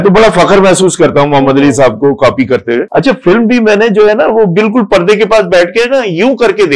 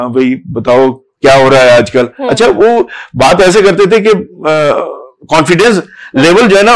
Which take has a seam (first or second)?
first